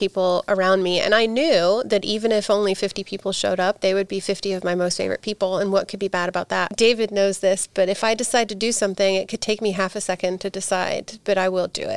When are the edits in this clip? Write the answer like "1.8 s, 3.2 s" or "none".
6.7 s